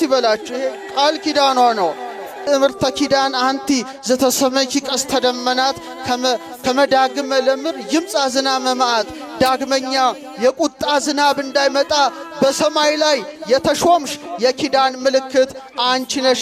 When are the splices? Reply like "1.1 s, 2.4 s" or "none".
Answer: 2.5 s